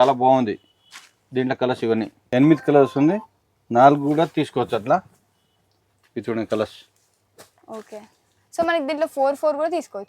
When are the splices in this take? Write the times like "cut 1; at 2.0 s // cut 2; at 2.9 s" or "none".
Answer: cut 1; at 2.2 s